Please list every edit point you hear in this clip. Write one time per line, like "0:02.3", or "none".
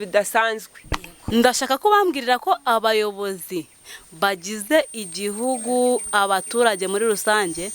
0:01.3